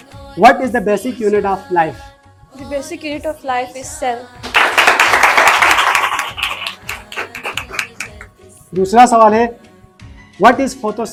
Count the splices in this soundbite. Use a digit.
0